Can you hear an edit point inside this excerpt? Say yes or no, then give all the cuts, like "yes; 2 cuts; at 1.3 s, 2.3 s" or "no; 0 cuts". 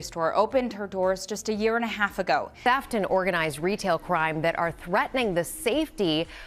yes; 1 cut; at 2.5 s